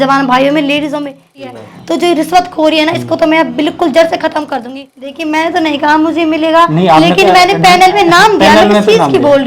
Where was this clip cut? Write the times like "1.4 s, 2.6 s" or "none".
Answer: 1.5 s, 5.2 s